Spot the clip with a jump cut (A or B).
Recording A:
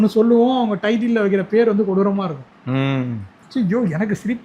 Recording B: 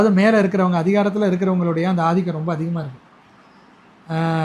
A